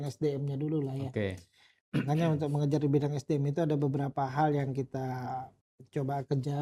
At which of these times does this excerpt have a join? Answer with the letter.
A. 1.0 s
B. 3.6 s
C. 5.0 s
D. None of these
D